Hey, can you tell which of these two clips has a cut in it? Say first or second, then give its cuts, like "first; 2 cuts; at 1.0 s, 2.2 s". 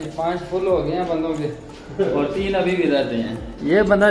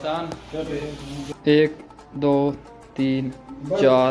second; 1 cut; at 1.2 s